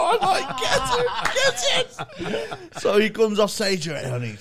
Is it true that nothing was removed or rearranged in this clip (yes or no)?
yes